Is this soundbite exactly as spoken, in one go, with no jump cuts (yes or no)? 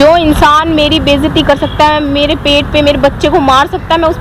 yes